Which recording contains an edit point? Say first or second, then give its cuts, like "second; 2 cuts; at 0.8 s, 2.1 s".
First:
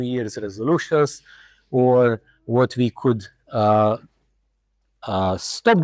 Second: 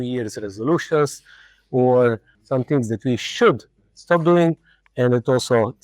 second; 1 cut; at 2.3 s